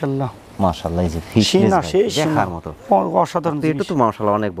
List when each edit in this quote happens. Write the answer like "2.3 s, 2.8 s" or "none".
none